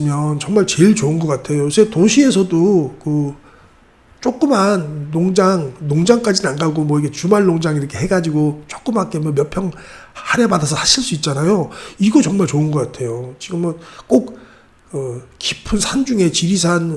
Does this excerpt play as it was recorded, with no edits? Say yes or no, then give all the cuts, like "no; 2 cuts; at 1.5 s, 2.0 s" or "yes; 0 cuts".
yes; 0 cuts